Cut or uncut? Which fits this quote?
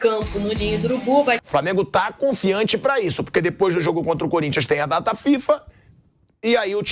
cut